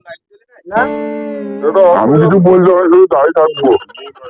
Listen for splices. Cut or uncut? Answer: uncut